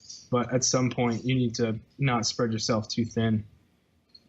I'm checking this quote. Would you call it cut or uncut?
cut